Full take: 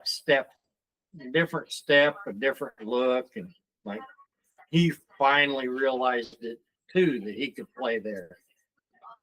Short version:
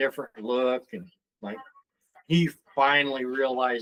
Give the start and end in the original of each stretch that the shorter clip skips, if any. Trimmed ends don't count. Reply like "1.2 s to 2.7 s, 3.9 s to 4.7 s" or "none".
none

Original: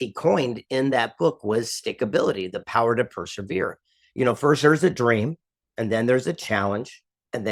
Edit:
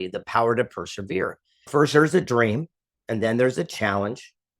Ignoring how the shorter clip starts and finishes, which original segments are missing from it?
4.1 s to 4.4 s

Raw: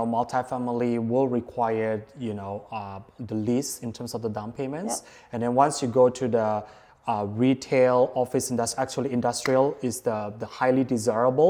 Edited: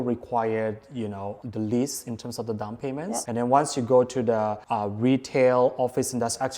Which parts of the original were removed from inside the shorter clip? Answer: 2.6 s to 3.1 s, 5.0 s to 5.3 s, 6.7 s to 7.0 s

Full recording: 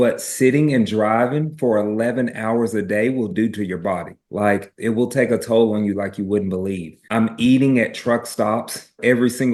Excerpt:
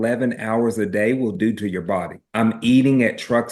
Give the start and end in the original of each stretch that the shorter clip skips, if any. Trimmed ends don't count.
4.1 s to 6.9 s

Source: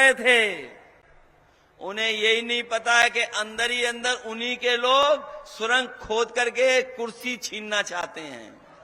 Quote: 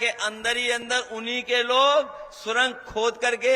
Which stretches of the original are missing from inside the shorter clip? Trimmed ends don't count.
none

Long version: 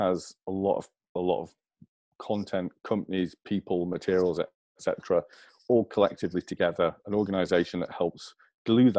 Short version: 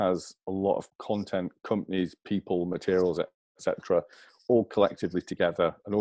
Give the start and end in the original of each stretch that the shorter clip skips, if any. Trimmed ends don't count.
0.9 s to 2.1 s

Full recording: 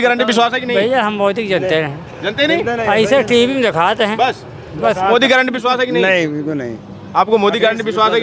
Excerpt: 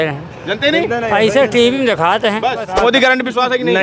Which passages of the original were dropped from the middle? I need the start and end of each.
4.4 s to 4.9 s

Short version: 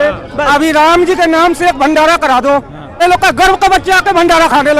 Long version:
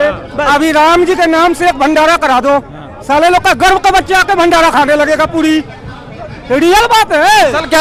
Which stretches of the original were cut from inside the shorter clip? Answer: 3.0 s to 3.2 s

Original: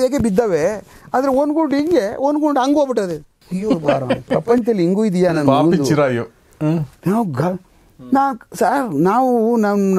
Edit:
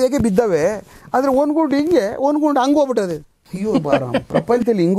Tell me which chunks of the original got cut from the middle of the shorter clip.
none

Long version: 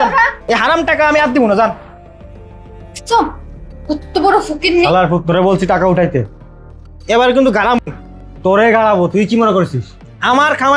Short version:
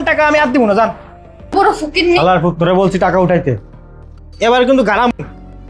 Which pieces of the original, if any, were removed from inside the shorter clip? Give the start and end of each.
2.3 s to 4.2 s

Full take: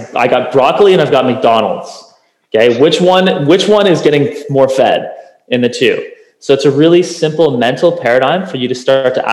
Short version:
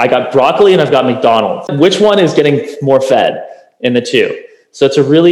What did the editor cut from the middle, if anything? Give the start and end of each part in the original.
1.9 s to 3.4 s

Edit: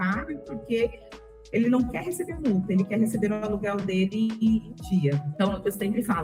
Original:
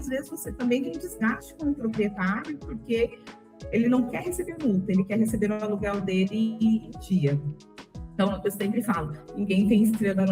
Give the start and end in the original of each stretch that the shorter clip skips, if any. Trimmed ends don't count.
7.5 s to 8.1 s

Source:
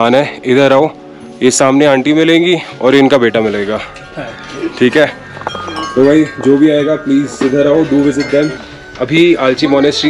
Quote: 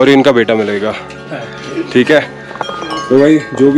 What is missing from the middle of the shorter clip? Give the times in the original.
none

